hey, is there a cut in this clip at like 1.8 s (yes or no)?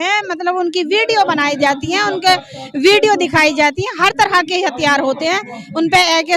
no